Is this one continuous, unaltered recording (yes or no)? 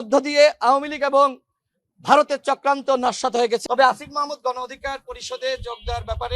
no